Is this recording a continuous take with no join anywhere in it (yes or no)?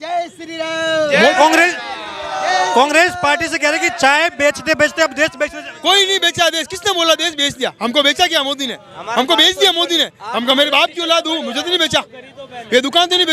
yes